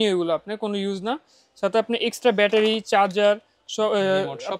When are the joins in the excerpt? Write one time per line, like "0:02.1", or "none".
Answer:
none